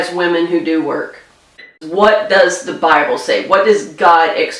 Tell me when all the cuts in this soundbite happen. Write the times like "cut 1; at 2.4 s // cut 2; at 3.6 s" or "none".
cut 1; at 1.8 s